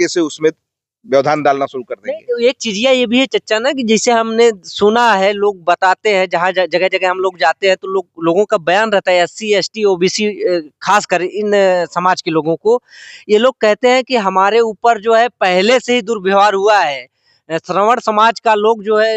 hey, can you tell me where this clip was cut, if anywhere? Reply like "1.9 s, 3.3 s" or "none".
none